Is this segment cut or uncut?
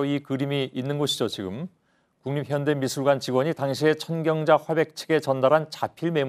cut